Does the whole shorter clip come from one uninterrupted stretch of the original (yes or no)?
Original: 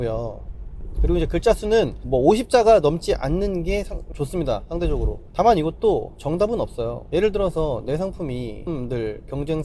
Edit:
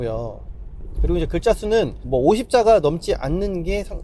yes